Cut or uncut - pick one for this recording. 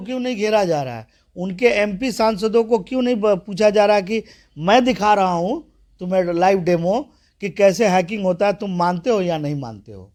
uncut